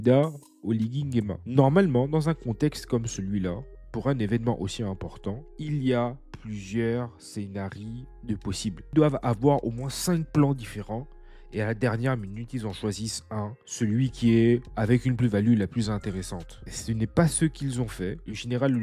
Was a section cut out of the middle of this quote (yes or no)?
no